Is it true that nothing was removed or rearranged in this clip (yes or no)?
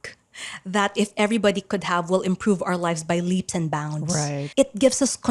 no